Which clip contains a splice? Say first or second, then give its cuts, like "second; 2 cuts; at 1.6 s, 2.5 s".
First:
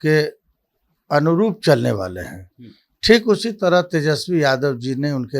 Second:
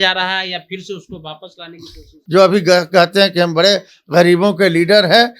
second; 1 cut; at 2.1 s